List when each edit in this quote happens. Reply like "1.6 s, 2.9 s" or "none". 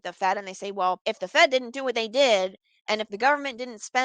1.0 s